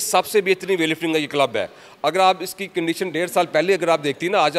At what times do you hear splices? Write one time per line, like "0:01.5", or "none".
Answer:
none